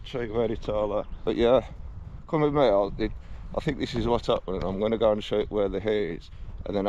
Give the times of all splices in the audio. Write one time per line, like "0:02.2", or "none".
0:01.1